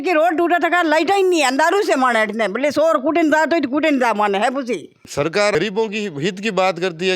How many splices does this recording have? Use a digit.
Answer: 1